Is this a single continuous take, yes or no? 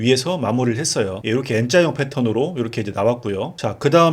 no